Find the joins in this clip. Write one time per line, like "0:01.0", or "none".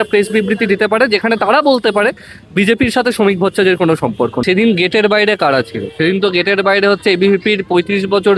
0:04.4